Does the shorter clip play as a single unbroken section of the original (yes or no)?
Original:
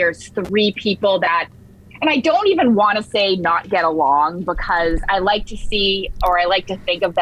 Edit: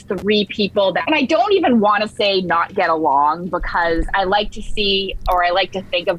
no